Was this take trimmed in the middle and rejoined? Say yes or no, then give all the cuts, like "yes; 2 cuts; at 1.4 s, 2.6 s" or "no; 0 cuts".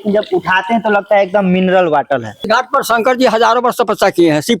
yes; 1 cut; at 2.4 s